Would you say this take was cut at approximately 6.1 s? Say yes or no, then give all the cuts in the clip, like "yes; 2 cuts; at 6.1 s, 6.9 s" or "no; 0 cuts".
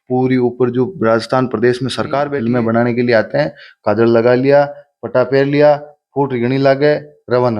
no; 1 cut; at 2.3 s